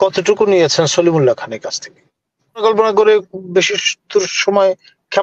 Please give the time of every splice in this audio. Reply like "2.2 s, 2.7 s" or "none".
2.6 s